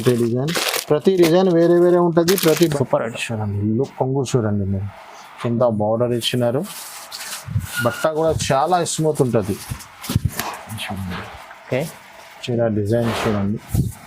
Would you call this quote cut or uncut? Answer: cut